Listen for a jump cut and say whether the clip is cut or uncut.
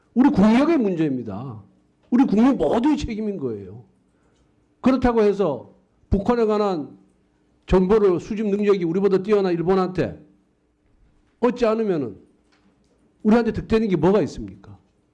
cut